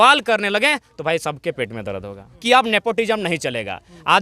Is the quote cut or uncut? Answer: cut